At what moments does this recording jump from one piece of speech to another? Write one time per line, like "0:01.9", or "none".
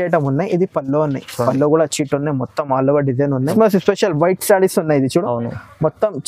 0:03.5